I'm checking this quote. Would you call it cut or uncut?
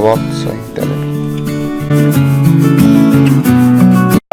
uncut